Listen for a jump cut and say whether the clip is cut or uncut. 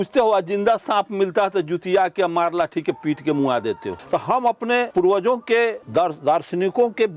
cut